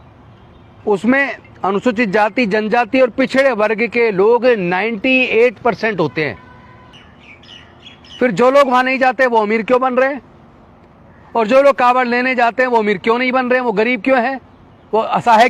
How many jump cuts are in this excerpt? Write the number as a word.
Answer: one